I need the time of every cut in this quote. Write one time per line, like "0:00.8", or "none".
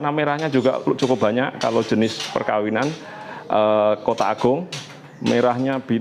none